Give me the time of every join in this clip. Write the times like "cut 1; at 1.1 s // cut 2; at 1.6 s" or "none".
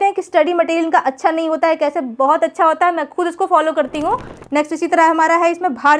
cut 1; at 4.4 s